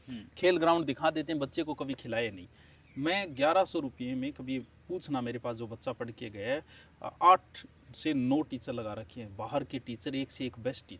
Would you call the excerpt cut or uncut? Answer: uncut